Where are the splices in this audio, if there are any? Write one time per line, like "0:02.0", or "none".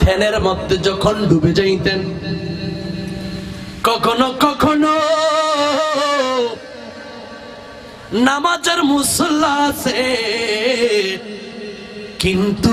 none